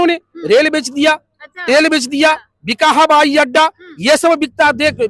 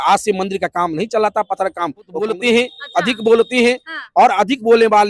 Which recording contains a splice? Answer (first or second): second